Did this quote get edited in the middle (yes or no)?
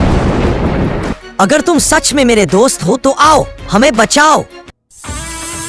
no